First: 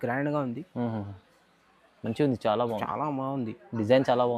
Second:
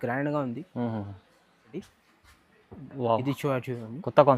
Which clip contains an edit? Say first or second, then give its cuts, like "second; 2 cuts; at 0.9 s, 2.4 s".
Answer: second; 1 cut; at 1.9 s